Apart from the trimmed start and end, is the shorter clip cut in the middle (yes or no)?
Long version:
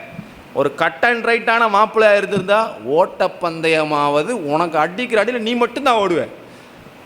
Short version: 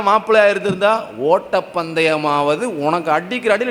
no